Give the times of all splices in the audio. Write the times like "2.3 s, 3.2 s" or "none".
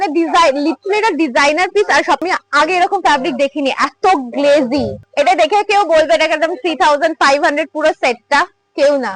2.2 s, 5.0 s